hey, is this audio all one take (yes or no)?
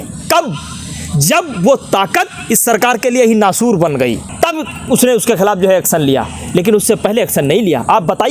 yes